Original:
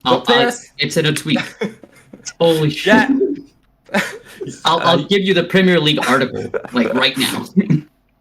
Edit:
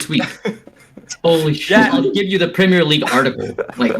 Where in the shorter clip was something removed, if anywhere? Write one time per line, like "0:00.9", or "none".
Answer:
0:02.1